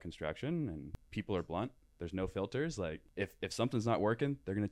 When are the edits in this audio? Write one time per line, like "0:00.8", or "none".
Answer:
0:01.0
0:03.0